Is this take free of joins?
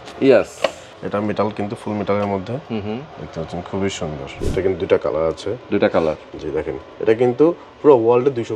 no; 3 cuts; at 0.9 s, 3.2 s, 4.4 s

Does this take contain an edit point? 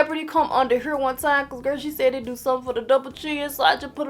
no; 0 cuts

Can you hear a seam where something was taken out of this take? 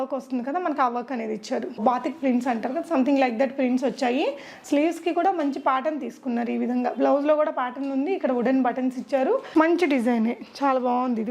yes; 2 cuts; at 1.8 s, 9.4 s

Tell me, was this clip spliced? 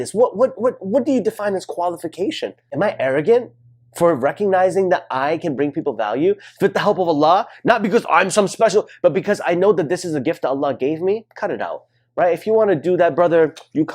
yes; 1 cut; at 2.6 s

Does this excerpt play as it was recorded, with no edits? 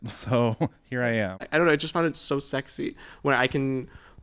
no; 1 cut; at 1.4 s

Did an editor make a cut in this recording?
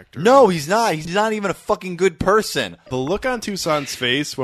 yes; 2 cuts; at 1.0 s, 2.8 s

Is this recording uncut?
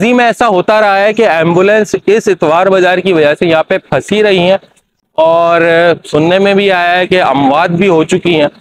yes; 0 cuts

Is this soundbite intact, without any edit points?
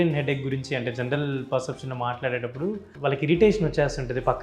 no; 1 cut; at 2.9 s

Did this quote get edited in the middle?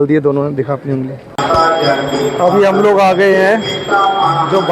yes; 1 cut; at 1.3 s

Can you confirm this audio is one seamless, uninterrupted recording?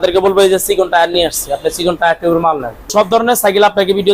no; 1 cut; at 2.9 s

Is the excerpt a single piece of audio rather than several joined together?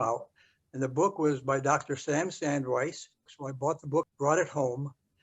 no; 2 cuts; at 3.4 s, 4.1 s

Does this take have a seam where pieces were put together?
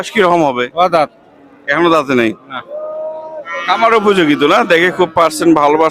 no; 0 cuts

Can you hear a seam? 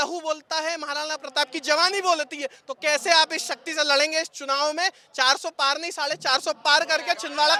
no; 0 cuts

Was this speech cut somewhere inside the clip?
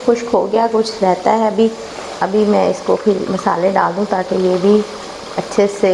no; 0 cuts

